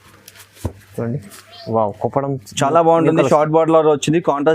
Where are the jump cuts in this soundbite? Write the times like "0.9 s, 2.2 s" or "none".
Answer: 1.3 s